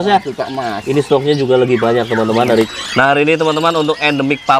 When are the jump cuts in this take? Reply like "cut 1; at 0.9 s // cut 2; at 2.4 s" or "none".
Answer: cut 1; at 2.7 s